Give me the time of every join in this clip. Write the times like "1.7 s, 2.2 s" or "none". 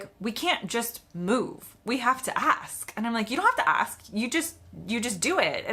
none